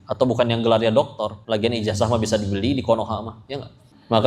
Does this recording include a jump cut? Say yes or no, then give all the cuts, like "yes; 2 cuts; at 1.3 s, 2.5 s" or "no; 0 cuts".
yes; 1 cut; at 1.4 s